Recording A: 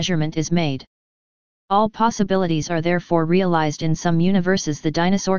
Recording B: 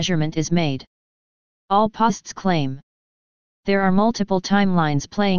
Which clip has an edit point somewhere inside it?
A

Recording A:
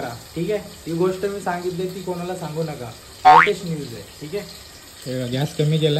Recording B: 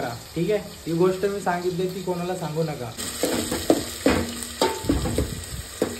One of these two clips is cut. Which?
B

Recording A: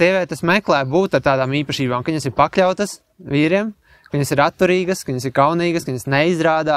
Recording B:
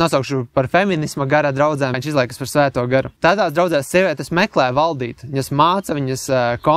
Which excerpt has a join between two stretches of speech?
B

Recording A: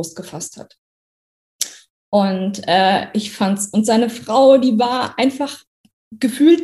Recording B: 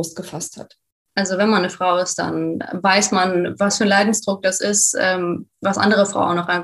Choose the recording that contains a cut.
B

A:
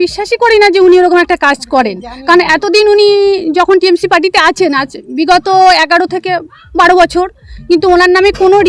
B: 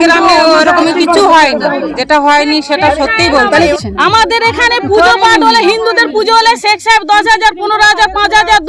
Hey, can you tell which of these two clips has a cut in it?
B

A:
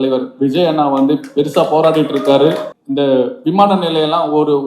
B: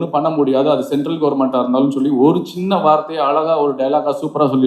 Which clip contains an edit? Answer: A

